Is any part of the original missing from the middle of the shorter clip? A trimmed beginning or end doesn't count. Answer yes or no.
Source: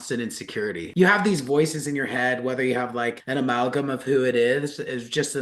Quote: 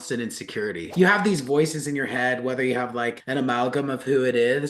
no